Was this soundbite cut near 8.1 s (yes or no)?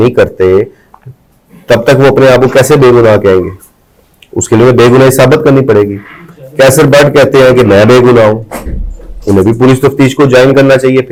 no